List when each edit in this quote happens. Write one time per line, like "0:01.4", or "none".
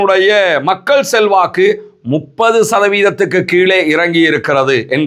none